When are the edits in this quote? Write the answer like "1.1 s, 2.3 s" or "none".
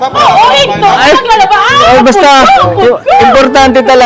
none